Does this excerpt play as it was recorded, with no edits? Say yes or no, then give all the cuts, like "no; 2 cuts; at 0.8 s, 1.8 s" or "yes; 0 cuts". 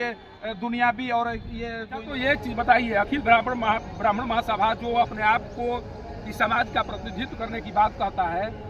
no; 1 cut; at 2.1 s